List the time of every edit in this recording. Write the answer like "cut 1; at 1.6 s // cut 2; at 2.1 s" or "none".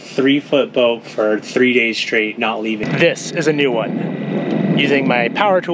cut 1; at 2.8 s